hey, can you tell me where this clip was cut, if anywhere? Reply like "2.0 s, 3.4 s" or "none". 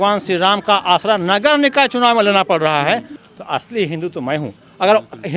3.2 s